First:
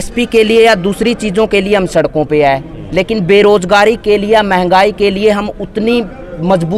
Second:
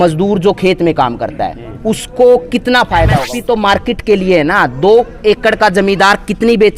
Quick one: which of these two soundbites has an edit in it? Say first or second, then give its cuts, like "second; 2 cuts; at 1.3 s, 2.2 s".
second; 1 cut; at 3.2 s